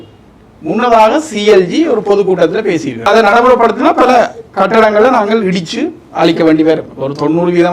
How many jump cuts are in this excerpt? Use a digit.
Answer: 1